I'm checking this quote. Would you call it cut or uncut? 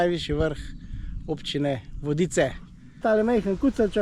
cut